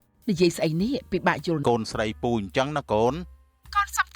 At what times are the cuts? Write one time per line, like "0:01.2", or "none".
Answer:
0:01.6